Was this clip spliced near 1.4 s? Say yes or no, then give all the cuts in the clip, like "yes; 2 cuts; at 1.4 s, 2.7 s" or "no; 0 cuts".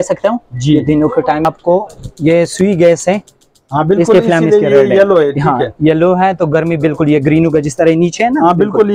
yes; 1 cut; at 1.4 s